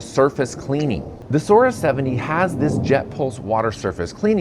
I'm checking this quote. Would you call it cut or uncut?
cut